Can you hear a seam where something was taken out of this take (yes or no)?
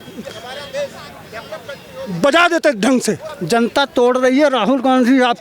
yes